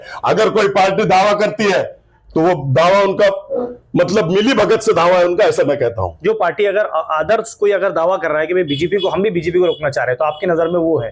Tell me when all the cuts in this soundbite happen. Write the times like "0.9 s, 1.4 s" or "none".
none